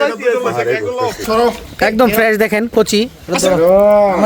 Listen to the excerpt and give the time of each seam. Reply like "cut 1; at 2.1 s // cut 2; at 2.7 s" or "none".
cut 1; at 1.2 s